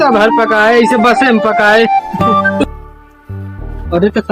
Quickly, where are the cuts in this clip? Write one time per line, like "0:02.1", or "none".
0:02.6